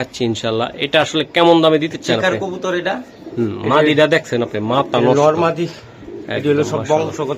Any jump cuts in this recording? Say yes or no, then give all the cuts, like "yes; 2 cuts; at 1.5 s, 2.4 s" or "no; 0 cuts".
no; 0 cuts